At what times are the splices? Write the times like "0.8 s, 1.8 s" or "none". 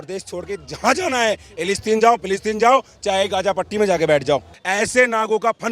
4.6 s